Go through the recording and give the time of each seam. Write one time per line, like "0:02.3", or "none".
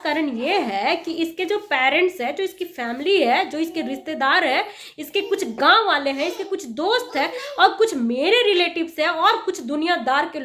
none